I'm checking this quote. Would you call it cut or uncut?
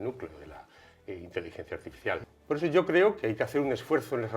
cut